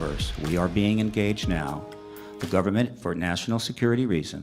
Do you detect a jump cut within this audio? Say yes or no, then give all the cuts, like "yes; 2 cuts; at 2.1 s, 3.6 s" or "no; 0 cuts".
no; 0 cuts